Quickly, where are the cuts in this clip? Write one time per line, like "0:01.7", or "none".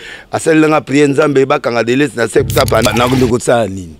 0:02.9